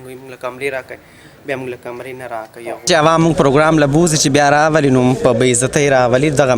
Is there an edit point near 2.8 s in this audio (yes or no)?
yes